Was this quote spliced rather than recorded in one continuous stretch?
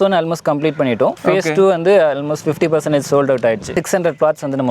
yes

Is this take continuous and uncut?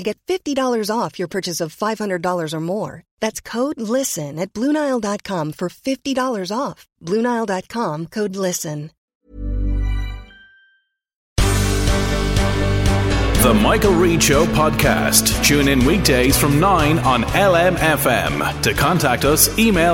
no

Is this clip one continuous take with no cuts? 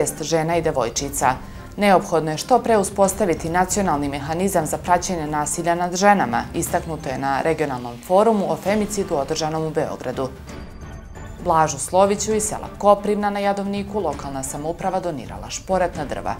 yes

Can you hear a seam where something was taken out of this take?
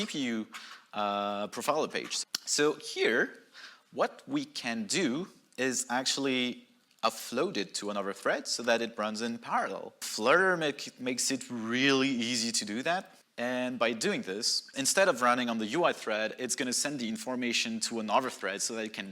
yes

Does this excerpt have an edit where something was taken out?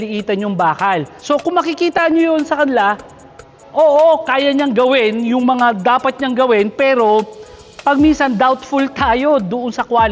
yes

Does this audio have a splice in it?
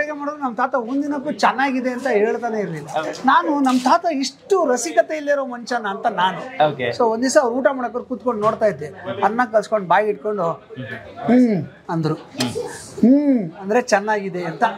yes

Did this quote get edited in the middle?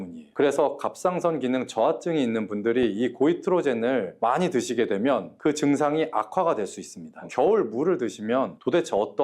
yes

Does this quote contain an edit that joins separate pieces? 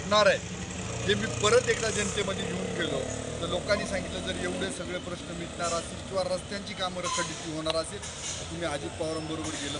no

